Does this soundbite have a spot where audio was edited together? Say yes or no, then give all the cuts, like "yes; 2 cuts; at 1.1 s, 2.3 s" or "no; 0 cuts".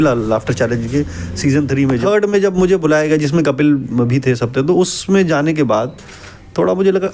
yes; 1 cut; at 2.0 s